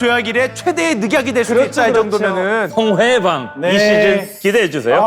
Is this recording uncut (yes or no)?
yes